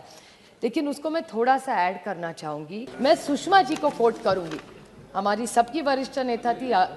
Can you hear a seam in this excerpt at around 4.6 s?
no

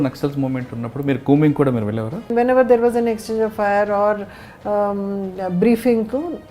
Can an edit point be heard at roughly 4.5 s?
no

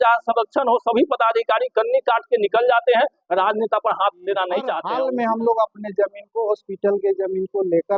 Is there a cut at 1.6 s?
no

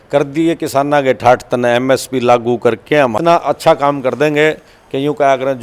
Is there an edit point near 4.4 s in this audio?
no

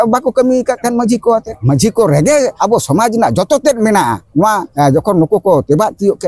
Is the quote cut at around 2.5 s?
yes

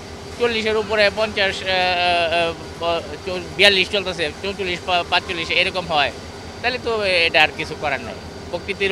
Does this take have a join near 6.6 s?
no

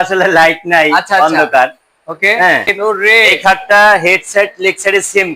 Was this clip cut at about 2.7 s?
yes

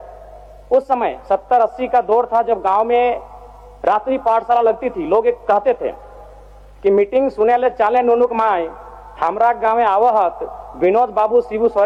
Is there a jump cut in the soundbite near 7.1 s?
no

